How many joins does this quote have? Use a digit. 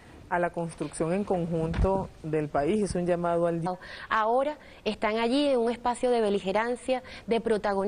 0